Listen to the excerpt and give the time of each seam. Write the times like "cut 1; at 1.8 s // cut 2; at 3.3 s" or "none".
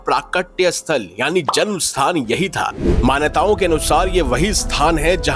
cut 1; at 2.8 s